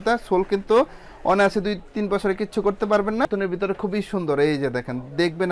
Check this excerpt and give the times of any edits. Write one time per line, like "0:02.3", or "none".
0:03.2